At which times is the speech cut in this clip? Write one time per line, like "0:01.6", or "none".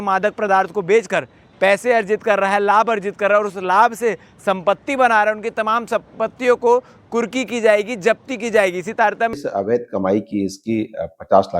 0:09.4